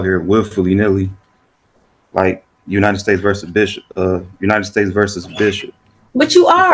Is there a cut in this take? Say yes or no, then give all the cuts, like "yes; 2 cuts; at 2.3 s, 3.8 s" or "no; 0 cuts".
no; 0 cuts